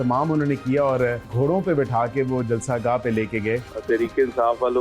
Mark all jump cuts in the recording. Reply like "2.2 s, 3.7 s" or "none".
1.2 s, 3.7 s